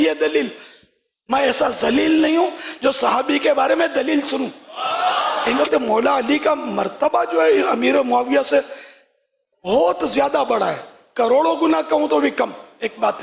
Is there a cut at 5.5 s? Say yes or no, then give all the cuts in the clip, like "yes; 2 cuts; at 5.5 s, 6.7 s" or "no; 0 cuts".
yes; 1 cut; at 5.5 s